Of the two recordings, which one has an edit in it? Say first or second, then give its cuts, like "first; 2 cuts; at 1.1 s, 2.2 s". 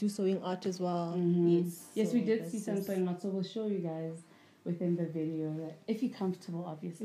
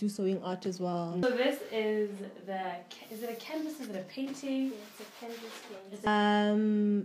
second; 2 cuts; at 1.2 s, 6.1 s